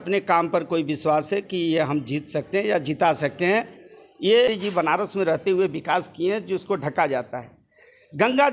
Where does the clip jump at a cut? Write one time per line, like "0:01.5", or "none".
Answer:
0:04.5